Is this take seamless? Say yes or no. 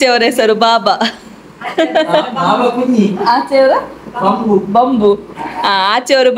yes